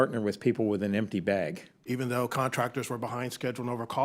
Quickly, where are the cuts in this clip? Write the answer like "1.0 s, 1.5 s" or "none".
1.7 s